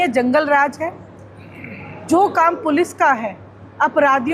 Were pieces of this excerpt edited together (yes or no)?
no